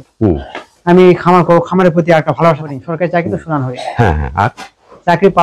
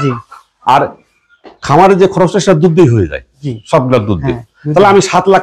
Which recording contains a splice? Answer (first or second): first